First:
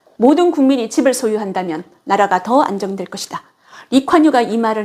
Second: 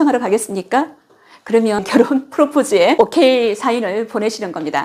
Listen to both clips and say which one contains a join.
second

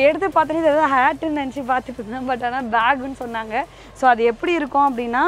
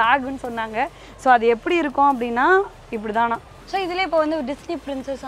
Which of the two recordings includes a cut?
second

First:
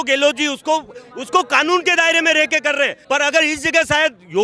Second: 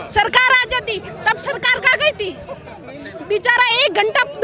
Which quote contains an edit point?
first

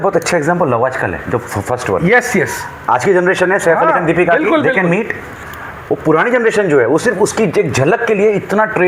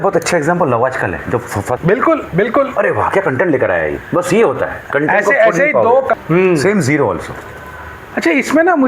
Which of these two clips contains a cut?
second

